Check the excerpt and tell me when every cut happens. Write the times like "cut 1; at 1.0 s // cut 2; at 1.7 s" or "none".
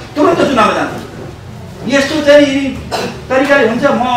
none